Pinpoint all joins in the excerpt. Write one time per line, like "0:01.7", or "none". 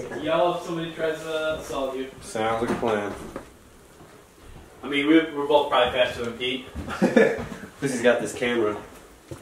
none